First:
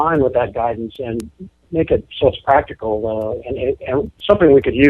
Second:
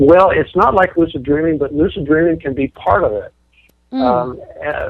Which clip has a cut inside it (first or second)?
first